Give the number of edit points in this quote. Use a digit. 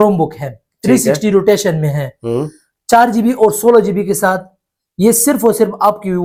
0